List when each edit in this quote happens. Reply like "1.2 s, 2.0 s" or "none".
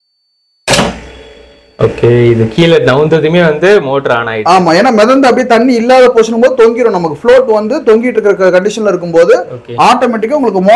none